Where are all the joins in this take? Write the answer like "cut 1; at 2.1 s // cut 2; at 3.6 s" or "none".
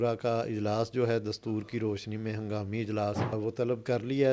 cut 1; at 3.3 s